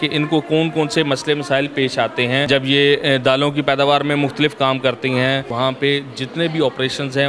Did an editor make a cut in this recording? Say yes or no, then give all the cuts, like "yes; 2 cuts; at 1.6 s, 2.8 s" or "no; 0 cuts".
yes; 2 cuts; at 2.5 s, 5.5 s